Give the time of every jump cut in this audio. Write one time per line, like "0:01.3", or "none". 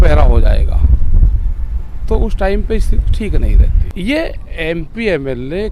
0:03.8

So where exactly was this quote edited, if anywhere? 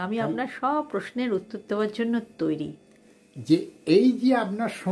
0:02.7

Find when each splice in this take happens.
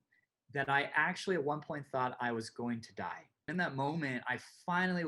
0:03.5

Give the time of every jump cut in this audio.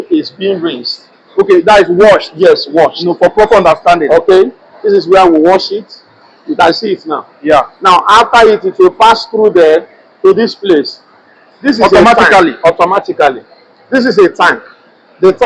none

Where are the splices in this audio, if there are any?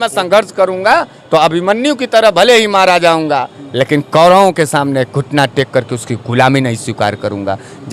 none

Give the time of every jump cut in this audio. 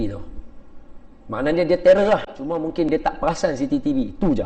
0:02.9

